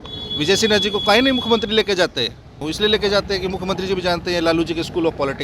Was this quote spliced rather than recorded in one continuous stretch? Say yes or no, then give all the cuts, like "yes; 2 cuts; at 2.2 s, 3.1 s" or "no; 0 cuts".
yes; 1 cut; at 2.6 s